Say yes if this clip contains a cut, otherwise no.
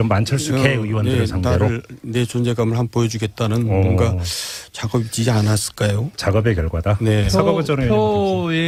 no